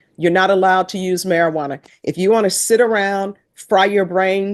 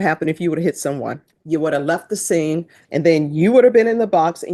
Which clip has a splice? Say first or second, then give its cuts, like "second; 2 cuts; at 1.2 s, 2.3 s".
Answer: second; 2 cuts; at 1.3 s, 2.8 s